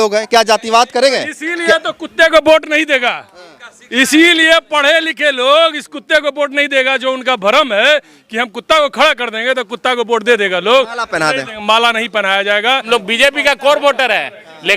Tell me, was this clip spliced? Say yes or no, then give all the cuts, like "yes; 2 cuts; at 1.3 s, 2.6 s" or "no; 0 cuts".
yes; 1 cut; at 12.8 s